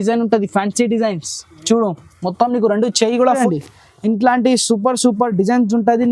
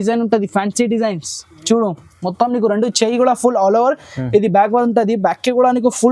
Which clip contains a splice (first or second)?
first